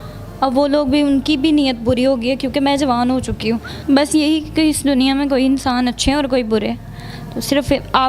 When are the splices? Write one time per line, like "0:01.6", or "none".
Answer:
0:03.7